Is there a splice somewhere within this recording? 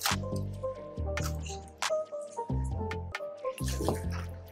yes; 1 cut; at 3.2 s

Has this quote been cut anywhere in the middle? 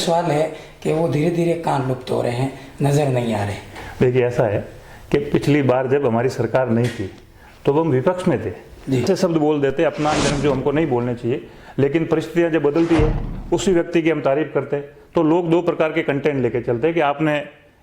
yes; 1 cut; at 9.0 s

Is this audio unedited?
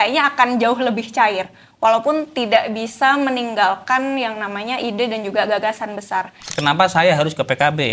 no; 1 cut; at 6.4 s

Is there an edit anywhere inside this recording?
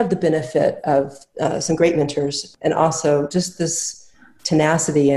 yes; 1 cut; at 2.4 s

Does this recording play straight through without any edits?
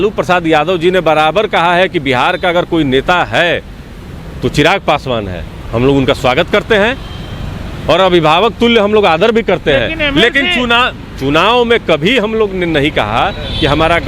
yes; 0 cuts

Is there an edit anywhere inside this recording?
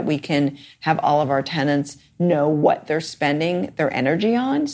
no; 0 cuts

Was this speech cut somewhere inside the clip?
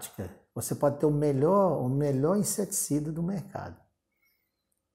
no; 0 cuts

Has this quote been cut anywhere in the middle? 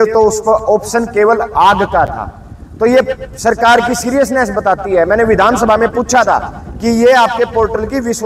no; 0 cuts

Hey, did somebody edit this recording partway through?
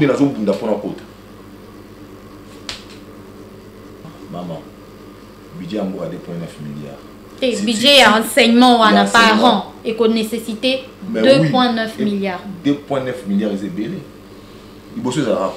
yes; 1 cut; at 4.1 s

